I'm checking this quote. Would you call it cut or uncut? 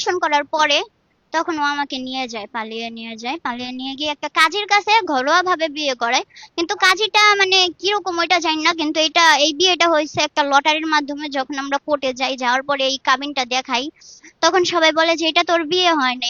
uncut